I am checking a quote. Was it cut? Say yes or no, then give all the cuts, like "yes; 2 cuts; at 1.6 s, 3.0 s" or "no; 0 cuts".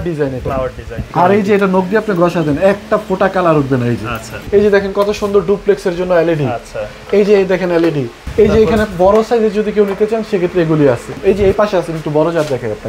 yes; 4 cuts; at 1.0 s, 4.4 s, 8.2 s, 11.1 s